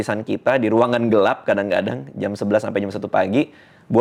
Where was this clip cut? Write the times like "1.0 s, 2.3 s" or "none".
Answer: none